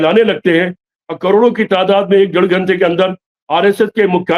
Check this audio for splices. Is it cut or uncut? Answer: uncut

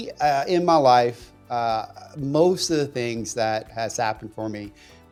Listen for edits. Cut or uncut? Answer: uncut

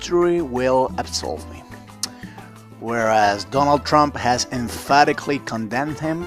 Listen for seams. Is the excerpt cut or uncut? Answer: uncut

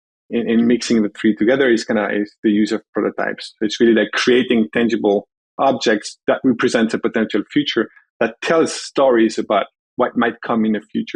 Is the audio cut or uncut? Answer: uncut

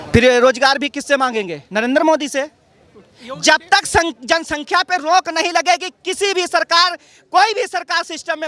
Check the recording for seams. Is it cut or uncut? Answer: uncut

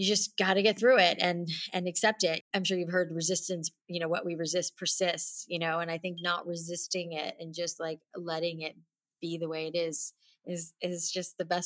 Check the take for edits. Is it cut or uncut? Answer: cut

